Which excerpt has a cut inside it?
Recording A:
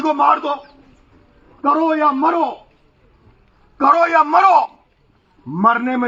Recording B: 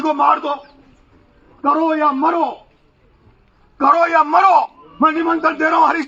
B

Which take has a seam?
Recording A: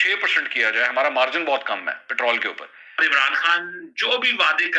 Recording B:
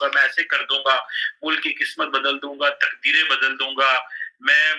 A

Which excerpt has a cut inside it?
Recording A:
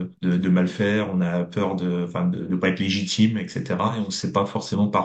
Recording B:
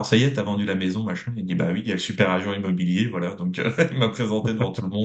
A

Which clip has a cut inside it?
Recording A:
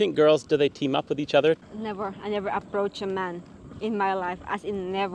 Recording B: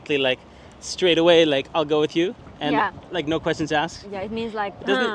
A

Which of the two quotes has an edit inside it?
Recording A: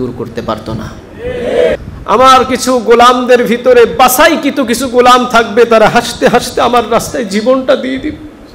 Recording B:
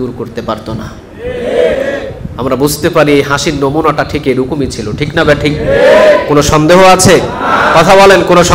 A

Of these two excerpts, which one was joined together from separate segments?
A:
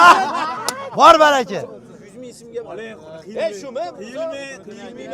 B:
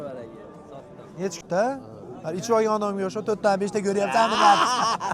B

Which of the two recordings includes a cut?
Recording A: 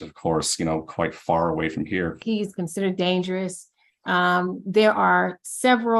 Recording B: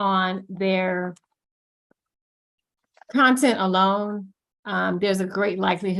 A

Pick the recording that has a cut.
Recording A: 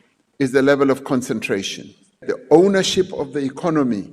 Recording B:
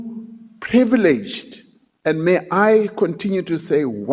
A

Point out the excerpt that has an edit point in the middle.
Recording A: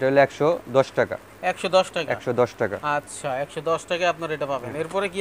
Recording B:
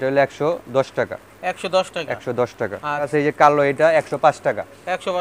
B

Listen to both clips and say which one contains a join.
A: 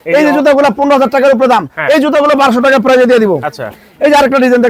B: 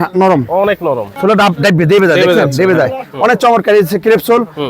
B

